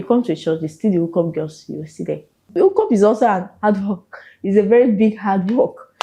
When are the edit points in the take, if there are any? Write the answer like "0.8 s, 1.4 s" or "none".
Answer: 2.5 s